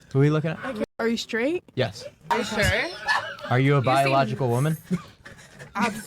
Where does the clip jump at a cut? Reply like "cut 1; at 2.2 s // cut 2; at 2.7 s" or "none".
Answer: cut 1; at 0.8 s // cut 2; at 2.3 s